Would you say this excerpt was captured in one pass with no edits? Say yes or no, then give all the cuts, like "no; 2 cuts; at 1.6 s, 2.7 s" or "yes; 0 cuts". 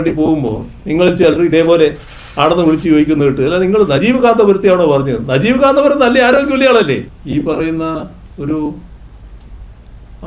no; 1 cut; at 7.1 s